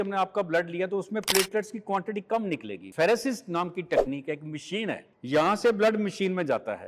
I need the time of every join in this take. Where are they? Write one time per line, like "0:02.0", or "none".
0:02.8
0:05.1